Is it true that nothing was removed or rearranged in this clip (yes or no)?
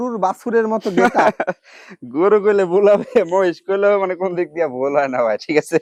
yes